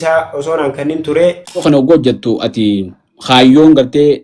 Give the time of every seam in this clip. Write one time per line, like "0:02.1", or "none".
0:01.6